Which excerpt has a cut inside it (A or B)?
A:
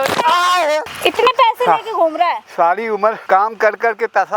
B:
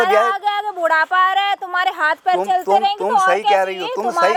A